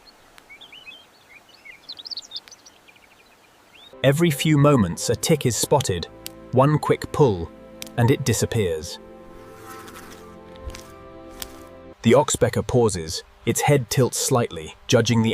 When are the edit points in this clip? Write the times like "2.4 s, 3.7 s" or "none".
3.9 s, 11.9 s